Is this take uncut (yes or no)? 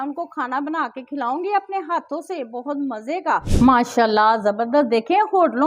no